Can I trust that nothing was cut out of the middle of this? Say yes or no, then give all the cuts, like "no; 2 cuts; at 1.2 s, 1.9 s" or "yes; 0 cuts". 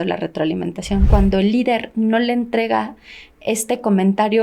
no; 1 cut; at 1.1 s